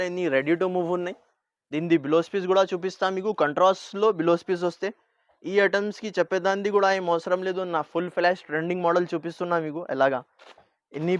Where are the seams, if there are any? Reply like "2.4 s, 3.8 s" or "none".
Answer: none